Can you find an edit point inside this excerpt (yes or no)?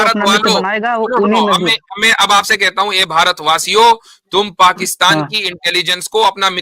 no